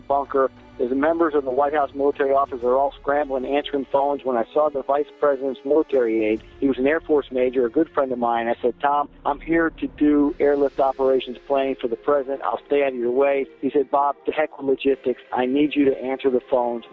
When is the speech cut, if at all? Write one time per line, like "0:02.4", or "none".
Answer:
0:06.5
0:09.1
0:13.9